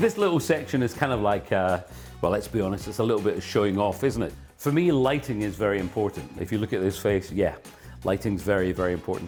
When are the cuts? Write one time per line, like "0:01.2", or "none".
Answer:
none